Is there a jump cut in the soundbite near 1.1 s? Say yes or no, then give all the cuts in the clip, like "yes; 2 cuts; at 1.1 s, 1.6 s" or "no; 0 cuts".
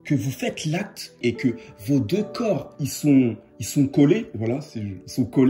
yes; 1 cut; at 1.1 s